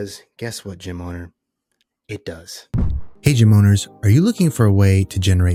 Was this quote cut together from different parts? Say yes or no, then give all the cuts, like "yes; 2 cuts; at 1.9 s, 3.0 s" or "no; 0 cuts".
no; 0 cuts